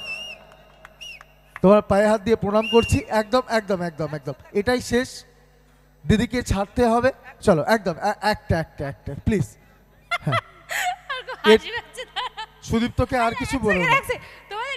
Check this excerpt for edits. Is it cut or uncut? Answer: uncut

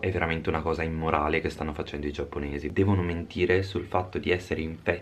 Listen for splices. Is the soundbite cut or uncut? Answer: cut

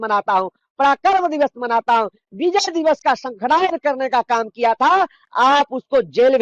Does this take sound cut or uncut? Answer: uncut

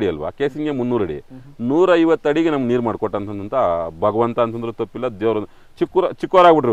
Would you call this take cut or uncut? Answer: uncut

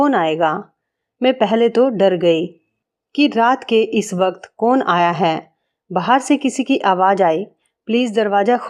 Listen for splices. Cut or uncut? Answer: uncut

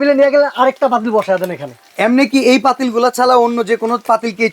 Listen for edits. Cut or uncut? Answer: cut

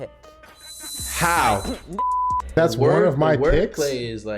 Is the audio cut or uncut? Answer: cut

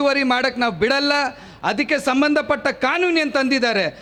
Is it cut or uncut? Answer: uncut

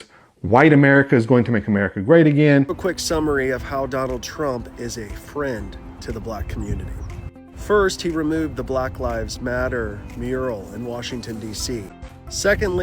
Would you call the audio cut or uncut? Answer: cut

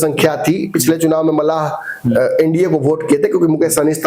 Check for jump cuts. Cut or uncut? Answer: uncut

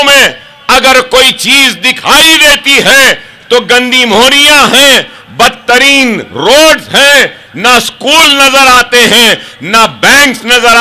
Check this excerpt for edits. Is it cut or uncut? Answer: uncut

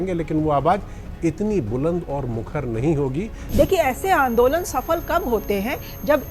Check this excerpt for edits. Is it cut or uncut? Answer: cut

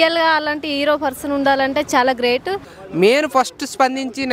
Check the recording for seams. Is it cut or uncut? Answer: cut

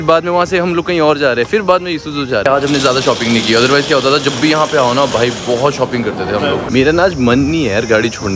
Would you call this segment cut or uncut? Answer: cut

